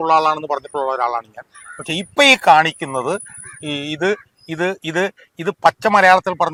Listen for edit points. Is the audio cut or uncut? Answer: uncut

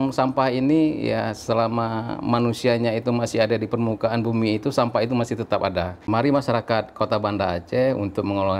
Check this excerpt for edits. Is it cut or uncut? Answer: cut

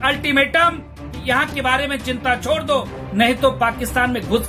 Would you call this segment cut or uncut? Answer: uncut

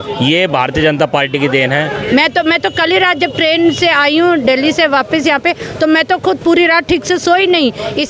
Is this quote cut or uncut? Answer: cut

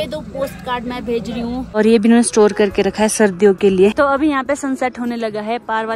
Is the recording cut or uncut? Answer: cut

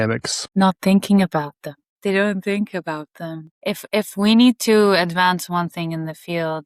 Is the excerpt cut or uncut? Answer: uncut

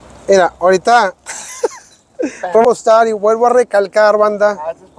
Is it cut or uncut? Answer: cut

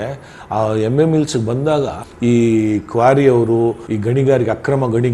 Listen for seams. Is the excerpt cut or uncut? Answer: cut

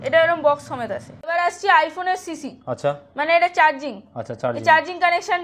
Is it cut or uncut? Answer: cut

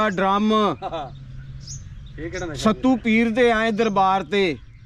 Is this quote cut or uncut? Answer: uncut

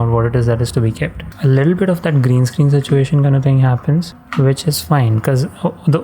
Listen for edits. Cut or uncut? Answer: cut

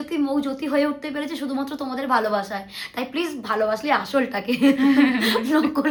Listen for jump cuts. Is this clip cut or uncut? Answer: uncut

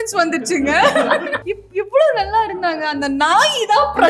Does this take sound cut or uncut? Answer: cut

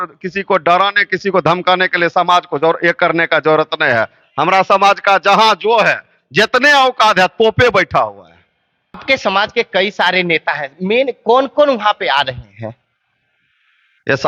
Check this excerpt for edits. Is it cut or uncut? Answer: uncut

